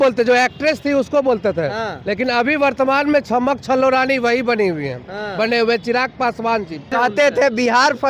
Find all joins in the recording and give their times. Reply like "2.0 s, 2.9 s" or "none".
6.9 s